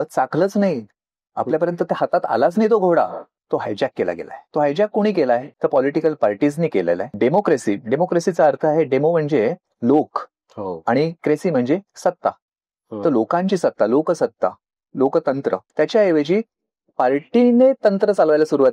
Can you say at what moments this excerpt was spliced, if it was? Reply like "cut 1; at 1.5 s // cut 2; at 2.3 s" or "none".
cut 1; at 4.3 s // cut 2; at 5.5 s // cut 3; at 7.1 s // cut 4; at 15.7 s